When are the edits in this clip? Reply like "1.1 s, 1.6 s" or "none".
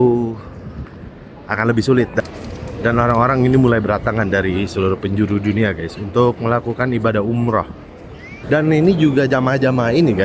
2.2 s, 8.3 s

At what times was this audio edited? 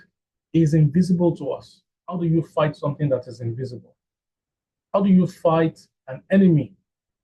2.0 s

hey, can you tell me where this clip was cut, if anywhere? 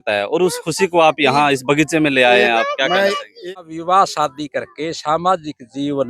3.4 s

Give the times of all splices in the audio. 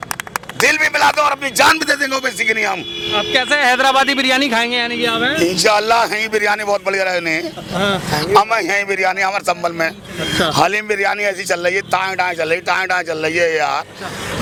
none

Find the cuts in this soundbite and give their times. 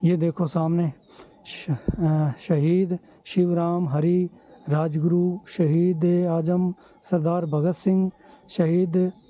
none

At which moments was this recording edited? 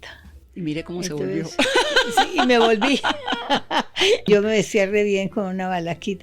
4.3 s

